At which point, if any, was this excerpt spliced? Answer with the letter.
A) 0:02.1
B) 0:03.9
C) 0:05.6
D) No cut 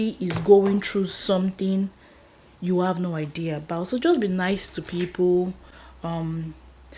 D